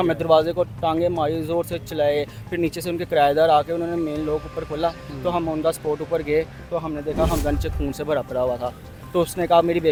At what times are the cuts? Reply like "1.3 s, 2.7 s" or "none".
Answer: none